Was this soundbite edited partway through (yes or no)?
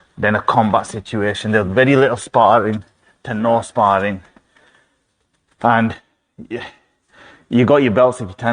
no